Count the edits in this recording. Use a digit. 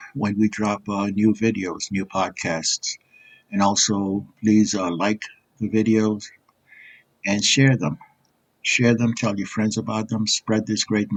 0